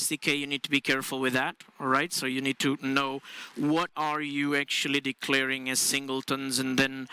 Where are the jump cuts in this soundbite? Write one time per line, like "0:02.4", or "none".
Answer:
none

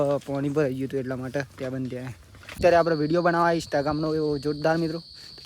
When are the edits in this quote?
0:02.5

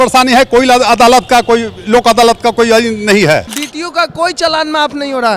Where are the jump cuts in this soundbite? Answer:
0:03.6

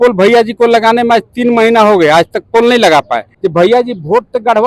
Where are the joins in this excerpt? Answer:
0:03.2

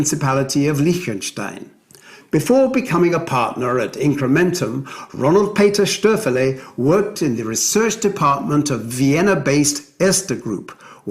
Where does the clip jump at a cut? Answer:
0:07.6

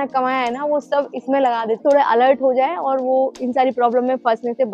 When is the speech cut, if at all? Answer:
0:01.8

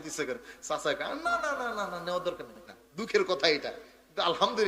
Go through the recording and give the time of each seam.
0:02.6

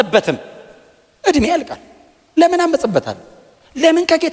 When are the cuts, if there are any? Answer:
none

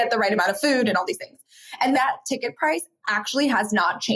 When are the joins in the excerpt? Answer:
0:02.0

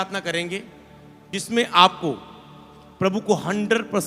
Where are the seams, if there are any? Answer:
0:01.3

